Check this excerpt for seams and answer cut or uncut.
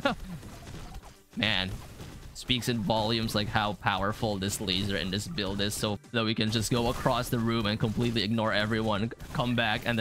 cut